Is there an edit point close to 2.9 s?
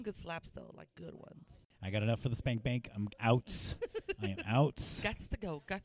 no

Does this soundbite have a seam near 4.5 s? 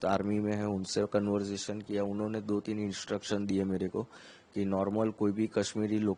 no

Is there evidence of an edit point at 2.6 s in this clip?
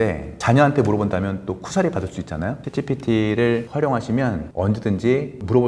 yes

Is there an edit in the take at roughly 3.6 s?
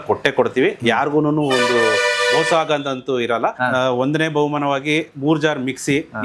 yes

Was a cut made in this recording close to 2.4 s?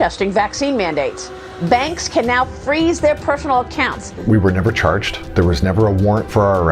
no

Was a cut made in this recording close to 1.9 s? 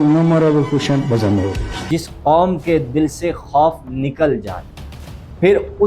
yes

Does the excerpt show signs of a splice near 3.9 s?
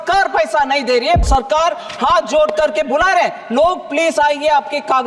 no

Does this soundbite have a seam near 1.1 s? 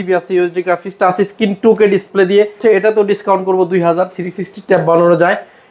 no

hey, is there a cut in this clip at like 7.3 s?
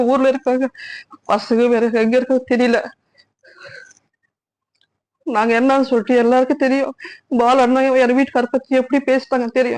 no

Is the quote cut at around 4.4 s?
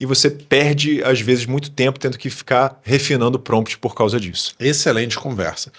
no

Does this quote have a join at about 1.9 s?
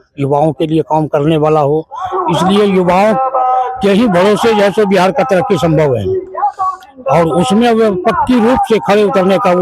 no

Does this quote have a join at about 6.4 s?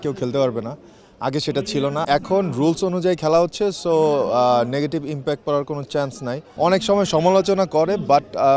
yes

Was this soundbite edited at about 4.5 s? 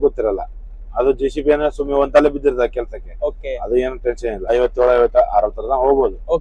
yes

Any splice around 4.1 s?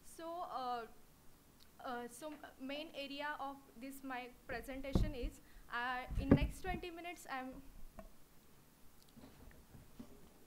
yes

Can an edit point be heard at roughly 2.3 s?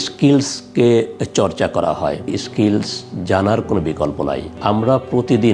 yes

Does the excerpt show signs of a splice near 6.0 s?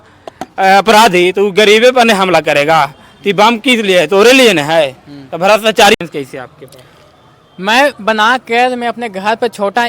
yes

